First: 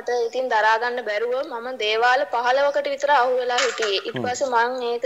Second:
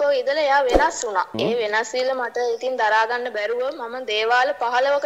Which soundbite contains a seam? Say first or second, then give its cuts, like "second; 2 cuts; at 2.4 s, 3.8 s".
second; 1 cut; at 1.3 s